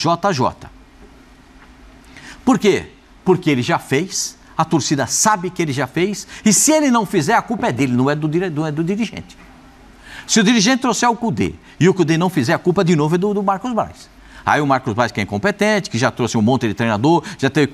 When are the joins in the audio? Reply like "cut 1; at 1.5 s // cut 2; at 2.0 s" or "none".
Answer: none